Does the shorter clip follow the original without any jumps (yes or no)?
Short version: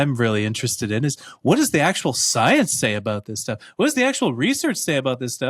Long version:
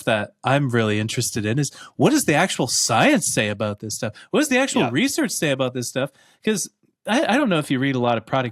yes